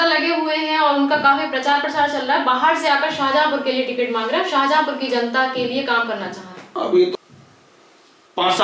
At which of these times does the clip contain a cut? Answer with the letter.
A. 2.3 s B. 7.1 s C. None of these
B